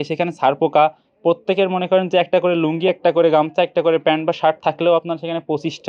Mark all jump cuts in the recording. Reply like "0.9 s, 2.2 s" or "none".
none